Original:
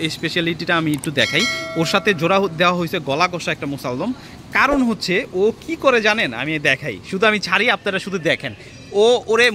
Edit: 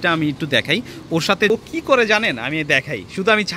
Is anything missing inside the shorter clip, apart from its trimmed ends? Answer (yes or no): yes